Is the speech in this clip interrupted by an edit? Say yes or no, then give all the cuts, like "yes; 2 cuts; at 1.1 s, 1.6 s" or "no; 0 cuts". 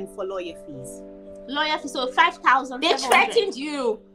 yes; 1 cut; at 2.8 s